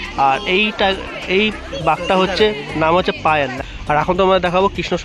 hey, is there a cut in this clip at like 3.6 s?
yes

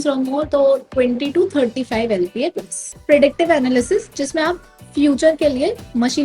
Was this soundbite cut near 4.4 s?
no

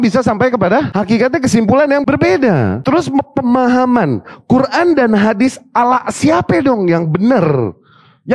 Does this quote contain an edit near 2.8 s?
yes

